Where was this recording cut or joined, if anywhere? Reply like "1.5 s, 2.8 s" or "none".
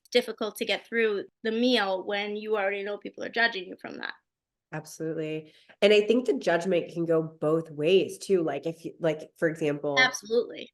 1.3 s

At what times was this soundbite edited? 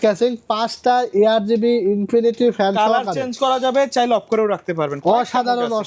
none

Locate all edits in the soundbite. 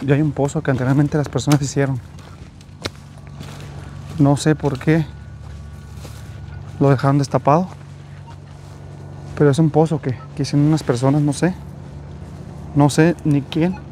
none

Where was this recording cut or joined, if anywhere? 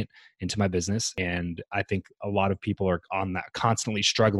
1.1 s

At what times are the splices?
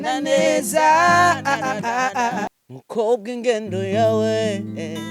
2.5 s

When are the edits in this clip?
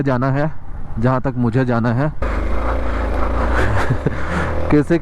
2.2 s

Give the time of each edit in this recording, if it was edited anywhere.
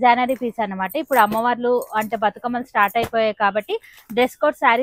none

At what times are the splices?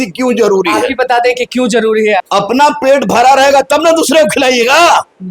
2.2 s

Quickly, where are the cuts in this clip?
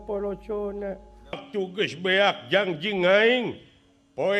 1.4 s

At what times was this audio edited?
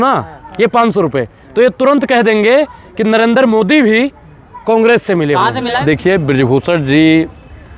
5.7 s

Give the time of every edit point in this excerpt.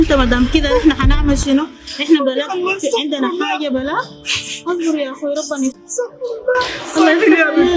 none

